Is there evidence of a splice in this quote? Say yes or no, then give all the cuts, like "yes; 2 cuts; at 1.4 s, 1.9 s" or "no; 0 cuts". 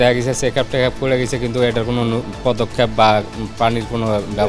no; 0 cuts